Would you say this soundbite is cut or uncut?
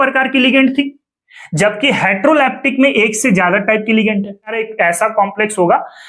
cut